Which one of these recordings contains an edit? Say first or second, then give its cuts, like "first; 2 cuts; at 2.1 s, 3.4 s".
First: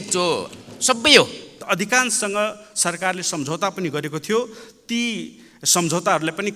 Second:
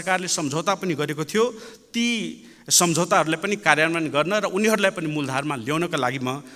first; 1 cut; at 1.6 s